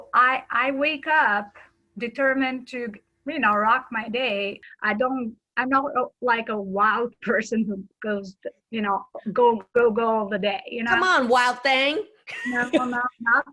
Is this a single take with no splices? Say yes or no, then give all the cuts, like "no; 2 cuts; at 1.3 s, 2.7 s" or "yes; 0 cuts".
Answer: no; 1 cut; at 4.6 s